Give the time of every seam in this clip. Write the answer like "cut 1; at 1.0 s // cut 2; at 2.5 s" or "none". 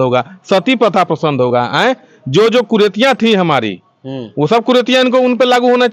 none